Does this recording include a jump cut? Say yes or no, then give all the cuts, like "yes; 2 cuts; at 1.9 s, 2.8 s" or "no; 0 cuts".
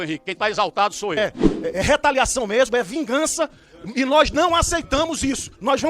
yes; 1 cut; at 1.2 s